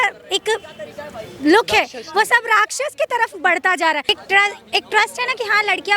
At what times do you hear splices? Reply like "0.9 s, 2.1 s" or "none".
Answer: 4.1 s